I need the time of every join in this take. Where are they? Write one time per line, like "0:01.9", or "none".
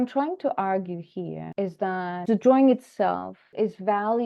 0:01.5
0:02.2
0:03.5